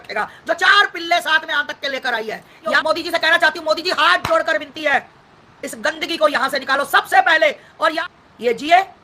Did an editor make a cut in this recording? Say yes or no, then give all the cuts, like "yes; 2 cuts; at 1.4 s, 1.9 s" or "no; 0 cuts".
yes; 2 cuts; at 2.8 s, 8.0 s